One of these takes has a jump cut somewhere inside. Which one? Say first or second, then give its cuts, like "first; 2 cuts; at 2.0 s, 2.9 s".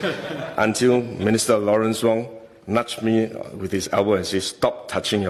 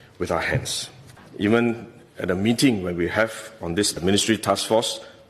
second; 1 cut; at 1.2 s